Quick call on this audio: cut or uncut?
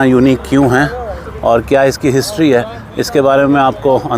uncut